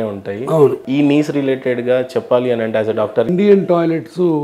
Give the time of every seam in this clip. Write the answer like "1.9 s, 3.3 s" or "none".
0.8 s, 3.3 s